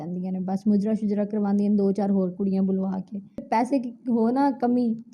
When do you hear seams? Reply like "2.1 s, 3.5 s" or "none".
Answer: 3.4 s